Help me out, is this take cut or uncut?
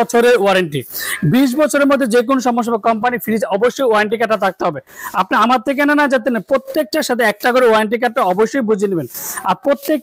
uncut